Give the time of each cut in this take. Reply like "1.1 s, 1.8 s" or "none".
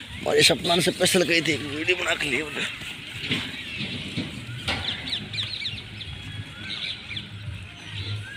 none